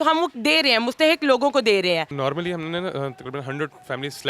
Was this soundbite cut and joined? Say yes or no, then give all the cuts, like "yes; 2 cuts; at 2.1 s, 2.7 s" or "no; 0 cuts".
yes; 1 cut; at 2.1 s